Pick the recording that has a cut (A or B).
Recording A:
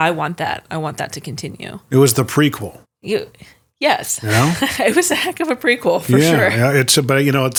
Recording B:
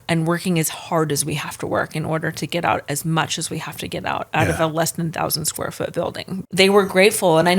B